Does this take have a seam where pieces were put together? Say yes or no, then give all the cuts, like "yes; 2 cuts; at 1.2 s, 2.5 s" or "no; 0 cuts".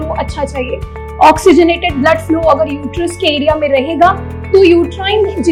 no; 0 cuts